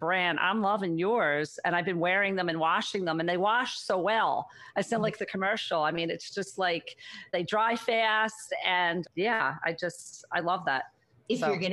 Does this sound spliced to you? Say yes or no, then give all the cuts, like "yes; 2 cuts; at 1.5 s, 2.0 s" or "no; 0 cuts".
no; 0 cuts